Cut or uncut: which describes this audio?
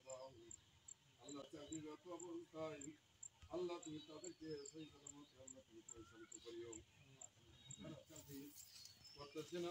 uncut